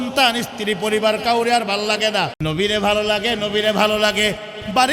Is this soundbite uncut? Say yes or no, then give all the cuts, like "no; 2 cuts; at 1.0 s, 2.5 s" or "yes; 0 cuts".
no; 1 cut; at 2.4 s